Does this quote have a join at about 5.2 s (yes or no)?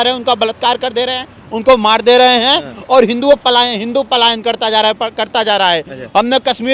no